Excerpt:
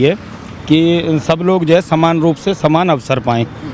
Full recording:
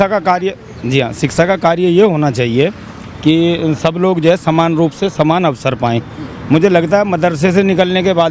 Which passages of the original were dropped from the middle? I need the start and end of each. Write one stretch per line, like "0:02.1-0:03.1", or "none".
none